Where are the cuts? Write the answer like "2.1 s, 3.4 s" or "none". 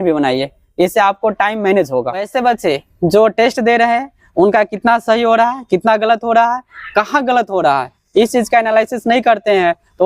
2.3 s